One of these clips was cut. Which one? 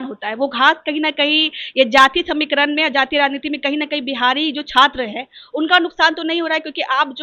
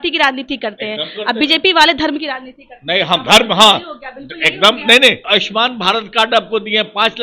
second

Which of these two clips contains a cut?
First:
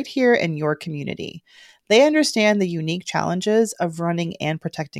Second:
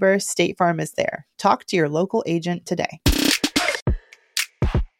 second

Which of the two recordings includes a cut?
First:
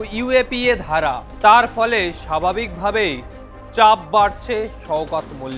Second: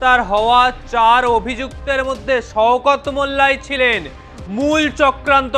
first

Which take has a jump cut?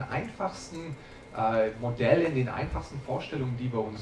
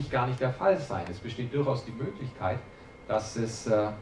first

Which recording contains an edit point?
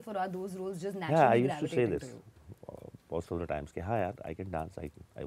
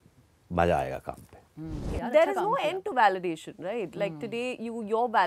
second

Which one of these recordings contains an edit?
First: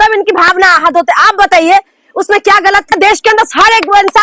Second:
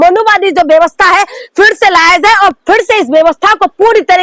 first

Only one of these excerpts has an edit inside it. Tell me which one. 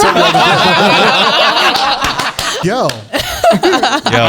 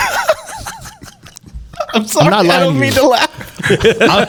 first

